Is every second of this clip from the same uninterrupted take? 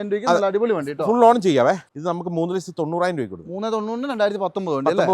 no; 1 cut; at 1.9 s

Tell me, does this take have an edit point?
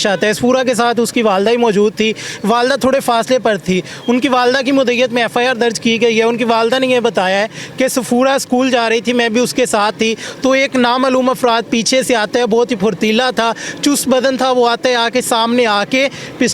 no; 0 cuts

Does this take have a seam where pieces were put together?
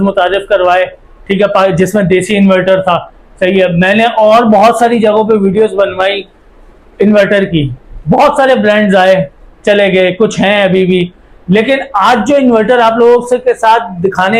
no; 0 cuts

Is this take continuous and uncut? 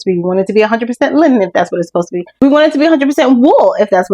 no; 1 cut; at 2.4 s

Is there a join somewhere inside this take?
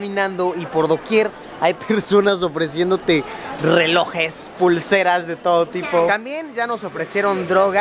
no; 0 cuts

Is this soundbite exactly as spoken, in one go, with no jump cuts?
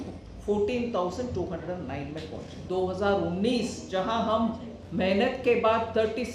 no; 1 cut; at 2.5 s

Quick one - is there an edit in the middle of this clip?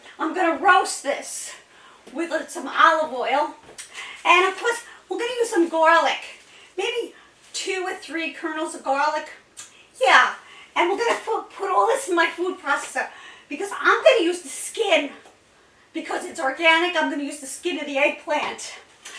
no; 0 cuts

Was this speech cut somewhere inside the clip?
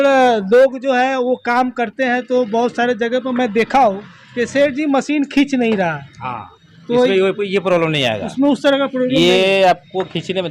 no; 0 cuts

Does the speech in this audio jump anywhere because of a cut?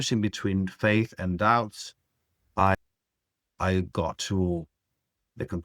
yes; 1 cut; at 2.8 s

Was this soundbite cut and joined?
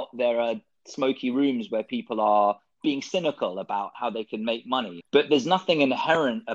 yes; 1 cut; at 5.0 s

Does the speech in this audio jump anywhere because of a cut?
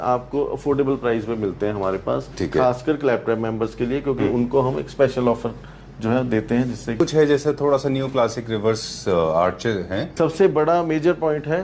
yes; 2 cuts; at 7.0 s, 10.2 s

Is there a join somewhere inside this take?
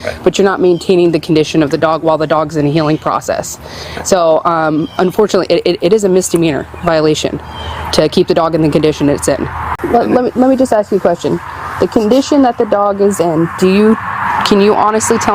yes; 1 cut; at 9.7 s

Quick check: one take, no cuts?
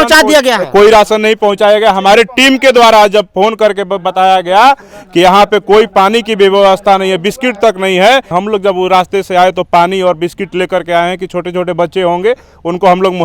no; 1 cut; at 8.3 s

